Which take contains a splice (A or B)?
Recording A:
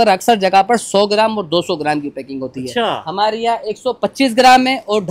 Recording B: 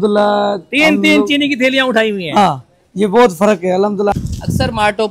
B